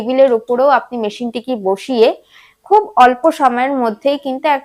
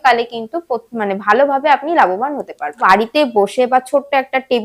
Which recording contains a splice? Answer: second; 1 cut; at 2.8 s

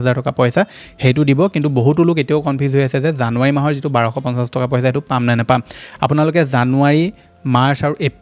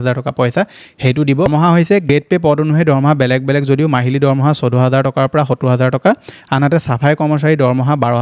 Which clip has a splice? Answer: second; 1 cut; at 1.5 s

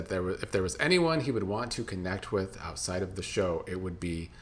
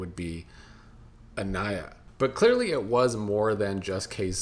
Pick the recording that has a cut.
second; 1 cut; at 2.0 s

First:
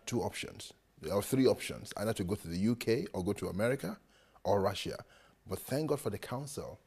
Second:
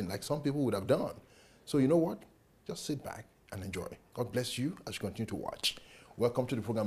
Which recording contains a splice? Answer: first; 1 cut; at 5.3 s

